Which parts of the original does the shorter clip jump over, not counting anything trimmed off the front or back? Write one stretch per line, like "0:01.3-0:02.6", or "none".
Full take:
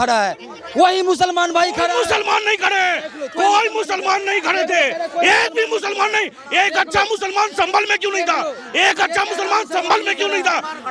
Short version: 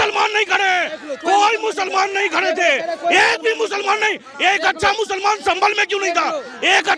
none